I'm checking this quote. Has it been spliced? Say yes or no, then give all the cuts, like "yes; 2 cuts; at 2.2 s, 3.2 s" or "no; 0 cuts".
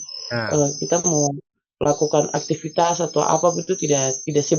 no; 0 cuts